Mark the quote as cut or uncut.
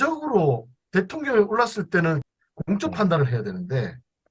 cut